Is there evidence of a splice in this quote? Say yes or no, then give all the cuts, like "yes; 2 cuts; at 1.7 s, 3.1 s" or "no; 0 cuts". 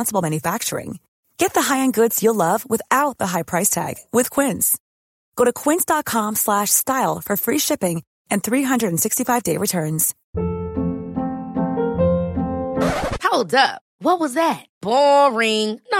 yes; 1 cut; at 10.1 s